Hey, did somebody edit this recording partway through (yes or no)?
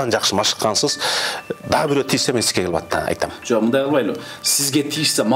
no